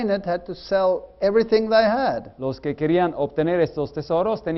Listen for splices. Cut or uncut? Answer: cut